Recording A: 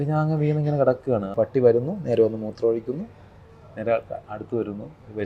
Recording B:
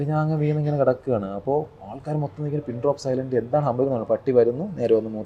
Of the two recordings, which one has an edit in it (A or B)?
A